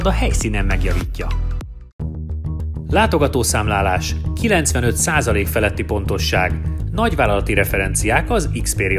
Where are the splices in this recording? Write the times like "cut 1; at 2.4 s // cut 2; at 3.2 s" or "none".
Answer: none